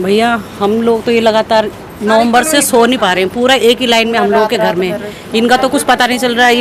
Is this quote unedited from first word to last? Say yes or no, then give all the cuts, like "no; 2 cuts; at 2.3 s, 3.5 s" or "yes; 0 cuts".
yes; 0 cuts